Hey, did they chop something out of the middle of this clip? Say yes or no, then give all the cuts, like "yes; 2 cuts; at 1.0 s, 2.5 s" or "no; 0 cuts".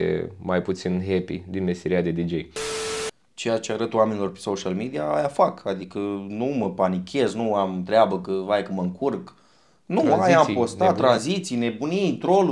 yes; 1 cut; at 2.8 s